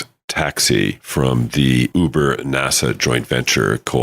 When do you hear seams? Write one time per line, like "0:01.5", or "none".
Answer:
0:01.0
0:01.9